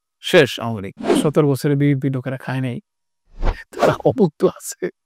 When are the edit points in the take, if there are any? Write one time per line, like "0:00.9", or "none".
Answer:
0:01.1